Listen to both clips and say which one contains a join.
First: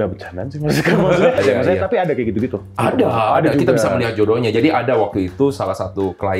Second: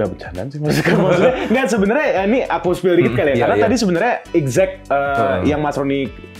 first; 1 cut; at 1.4 s

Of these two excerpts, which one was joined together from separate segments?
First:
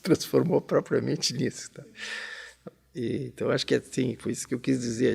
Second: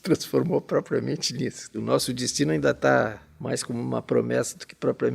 second; 2 cuts; at 1.8 s, 3.3 s

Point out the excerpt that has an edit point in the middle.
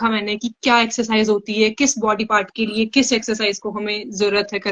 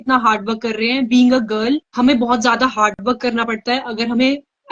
second; 1 cut; at 1.9 s

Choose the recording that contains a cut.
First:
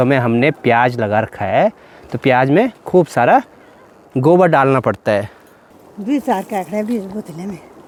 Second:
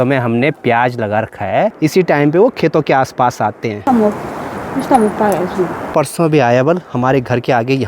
second; 3 cuts; at 1.7 s, 3.8 s, 5.8 s

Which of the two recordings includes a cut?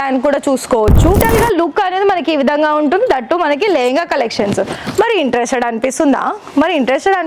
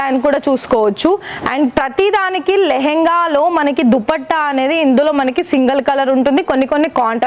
first; 1 cut; at 1.2 s

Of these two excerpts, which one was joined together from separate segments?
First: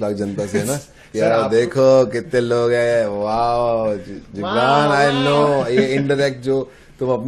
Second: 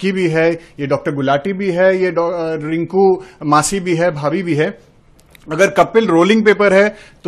first; 1 cut; at 1.0 s

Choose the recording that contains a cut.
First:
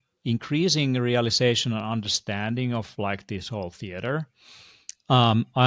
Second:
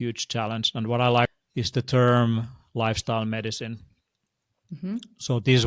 second; 1 cut; at 1.3 s

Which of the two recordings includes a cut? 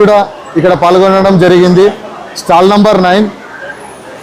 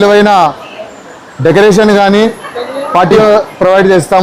second; 1 cut; at 3.2 s

